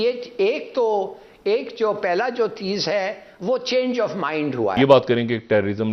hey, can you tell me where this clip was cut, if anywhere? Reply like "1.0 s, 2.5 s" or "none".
4.8 s